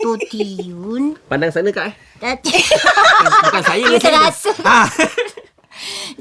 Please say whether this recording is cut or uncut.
uncut